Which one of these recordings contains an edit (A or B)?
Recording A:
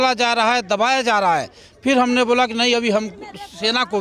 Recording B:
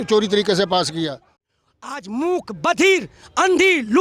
B